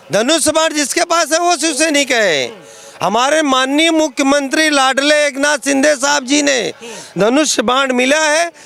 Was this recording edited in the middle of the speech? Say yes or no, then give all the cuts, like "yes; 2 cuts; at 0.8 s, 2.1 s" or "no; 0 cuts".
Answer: no; 0 cuts